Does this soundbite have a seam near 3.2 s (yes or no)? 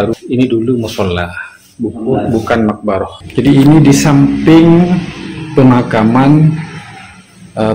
yes